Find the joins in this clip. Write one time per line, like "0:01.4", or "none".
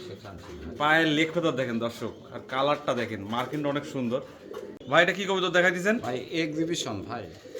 0:04.7

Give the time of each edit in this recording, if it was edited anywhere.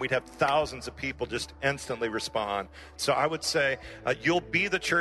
0:02.9

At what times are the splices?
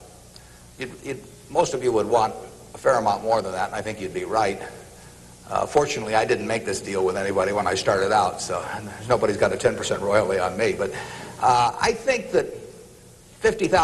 0:10.8

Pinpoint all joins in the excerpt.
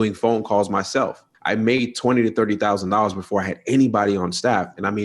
0:01.3

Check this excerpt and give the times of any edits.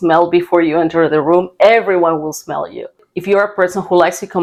none

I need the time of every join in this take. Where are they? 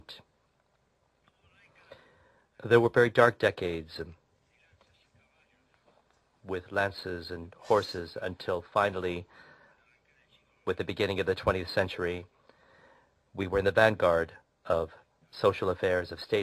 0:05.3

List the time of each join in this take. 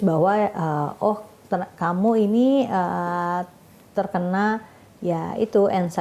none

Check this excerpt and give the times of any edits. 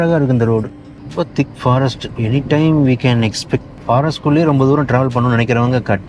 0:01.0
0:03.7

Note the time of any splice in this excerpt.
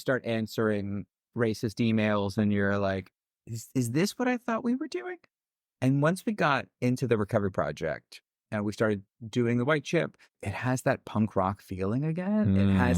0:10.4

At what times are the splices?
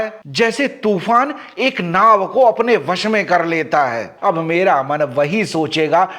0:04.1

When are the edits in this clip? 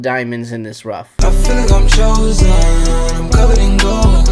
0:01.1

